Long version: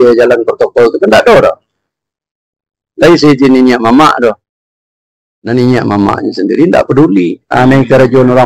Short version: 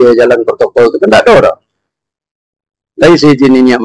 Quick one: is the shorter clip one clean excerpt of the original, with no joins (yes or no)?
yes